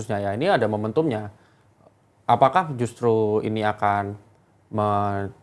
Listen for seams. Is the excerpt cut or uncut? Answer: uncut